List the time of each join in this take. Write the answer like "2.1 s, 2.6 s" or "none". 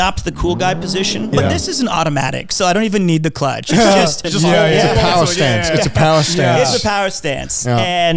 1.3 s, 4.2 s